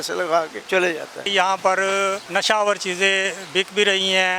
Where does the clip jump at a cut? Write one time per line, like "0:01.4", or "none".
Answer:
0:01.1
0:02.2